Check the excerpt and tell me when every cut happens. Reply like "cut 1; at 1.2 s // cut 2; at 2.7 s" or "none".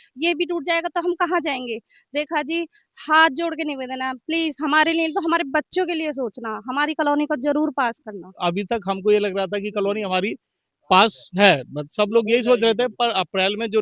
cut 1; at 8.3 s